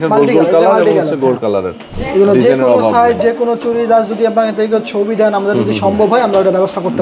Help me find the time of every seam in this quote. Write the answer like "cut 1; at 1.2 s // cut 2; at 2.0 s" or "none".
cut 1; at 1.9 s